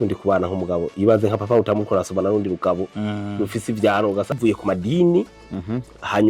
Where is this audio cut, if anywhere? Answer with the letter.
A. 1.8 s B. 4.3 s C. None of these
B